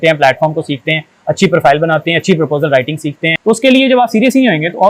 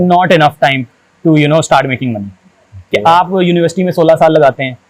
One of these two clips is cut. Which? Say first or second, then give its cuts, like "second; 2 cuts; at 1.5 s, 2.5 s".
first; 1 cut; at 3.3 s